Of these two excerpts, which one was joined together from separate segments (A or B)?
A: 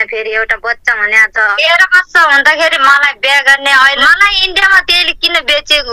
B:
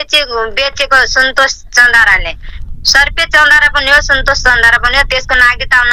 A